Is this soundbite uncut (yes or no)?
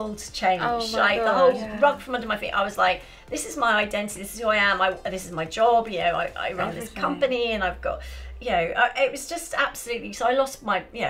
yes